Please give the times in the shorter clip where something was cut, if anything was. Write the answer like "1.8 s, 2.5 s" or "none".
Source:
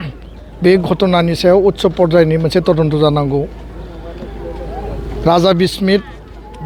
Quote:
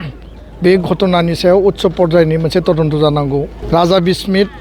3.6 s